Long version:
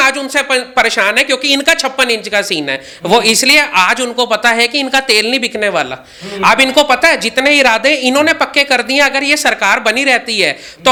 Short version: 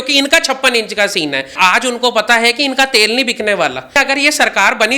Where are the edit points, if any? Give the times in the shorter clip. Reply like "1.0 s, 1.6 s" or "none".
1.5 s, 4.0 s